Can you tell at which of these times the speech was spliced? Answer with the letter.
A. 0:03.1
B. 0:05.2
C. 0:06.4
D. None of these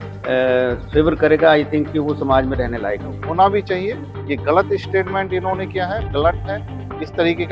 A